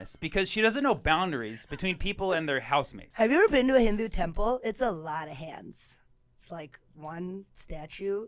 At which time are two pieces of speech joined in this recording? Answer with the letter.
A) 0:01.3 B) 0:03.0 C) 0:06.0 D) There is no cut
B